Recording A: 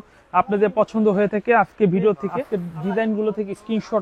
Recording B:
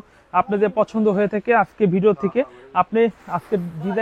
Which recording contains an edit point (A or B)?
A